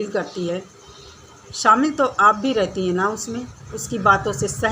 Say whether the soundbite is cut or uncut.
cut